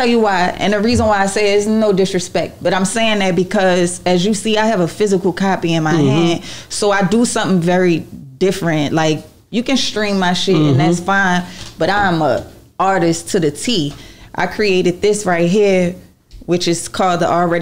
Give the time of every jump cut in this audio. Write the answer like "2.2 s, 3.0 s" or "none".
none